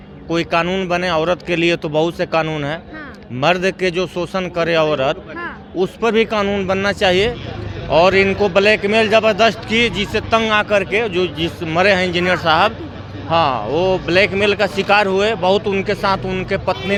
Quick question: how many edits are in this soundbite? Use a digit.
0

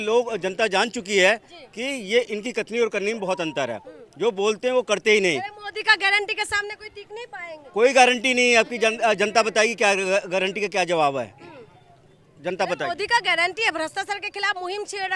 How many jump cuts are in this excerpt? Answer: 0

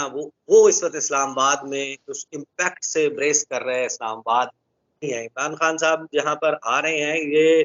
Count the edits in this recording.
1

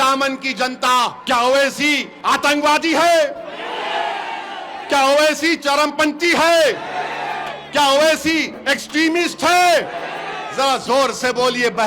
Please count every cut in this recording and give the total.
2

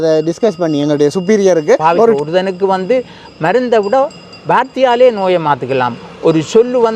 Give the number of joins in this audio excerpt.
1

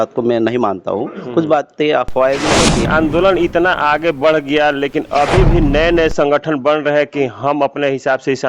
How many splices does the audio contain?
1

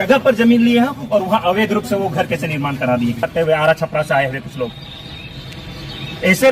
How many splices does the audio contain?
1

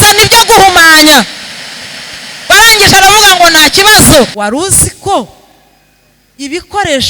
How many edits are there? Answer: 1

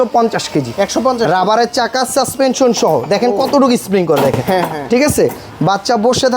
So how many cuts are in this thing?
0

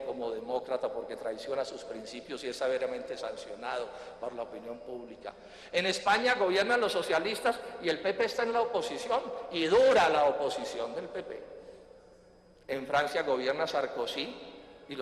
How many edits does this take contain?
1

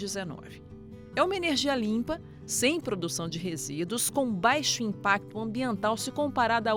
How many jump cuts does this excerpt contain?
0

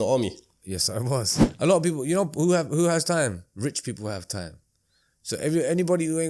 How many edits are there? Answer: 1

